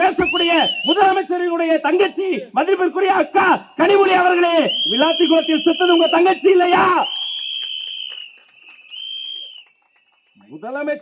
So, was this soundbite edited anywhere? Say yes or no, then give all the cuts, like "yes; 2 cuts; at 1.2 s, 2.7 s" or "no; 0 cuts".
no; 0 cuts